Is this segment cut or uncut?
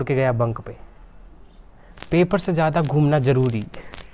uncut